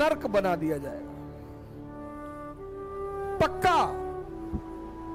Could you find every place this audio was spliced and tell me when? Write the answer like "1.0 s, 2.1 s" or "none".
none